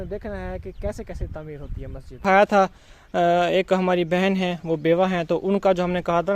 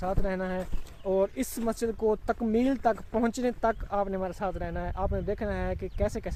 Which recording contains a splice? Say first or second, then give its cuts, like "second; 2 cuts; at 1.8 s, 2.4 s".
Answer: first; 1 cut; at 2.2 s